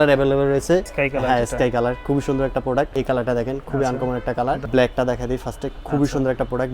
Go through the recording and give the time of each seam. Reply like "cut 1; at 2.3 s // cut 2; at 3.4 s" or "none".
cut 1; at 0.9 s // cut 2; at 2.9 s // cut 3; at 4.6 s